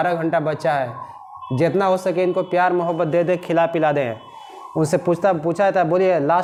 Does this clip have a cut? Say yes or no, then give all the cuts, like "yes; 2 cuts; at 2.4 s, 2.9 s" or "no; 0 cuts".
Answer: no; 0 cuts